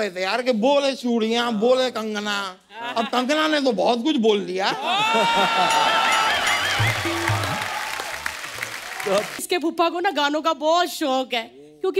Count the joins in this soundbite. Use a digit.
1